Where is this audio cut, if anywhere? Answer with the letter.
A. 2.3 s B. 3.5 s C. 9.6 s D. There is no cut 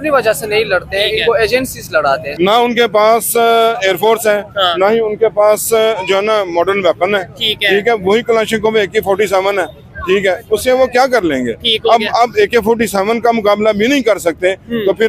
A